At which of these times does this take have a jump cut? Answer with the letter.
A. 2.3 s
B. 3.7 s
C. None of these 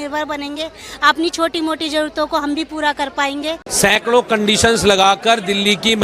B